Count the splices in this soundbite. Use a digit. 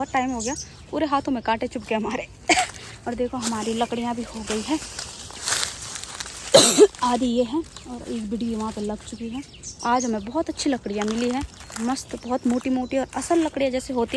0